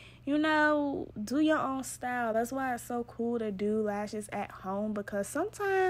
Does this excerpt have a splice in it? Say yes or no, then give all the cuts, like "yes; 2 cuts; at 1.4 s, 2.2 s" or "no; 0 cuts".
no; 0 cuts